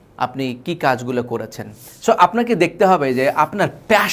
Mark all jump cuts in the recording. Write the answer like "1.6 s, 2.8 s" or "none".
1.9 s